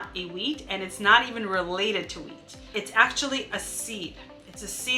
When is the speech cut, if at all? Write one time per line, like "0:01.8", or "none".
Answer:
0:02.7